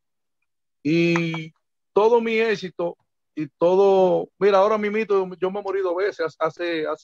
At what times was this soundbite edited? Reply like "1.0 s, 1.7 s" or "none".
none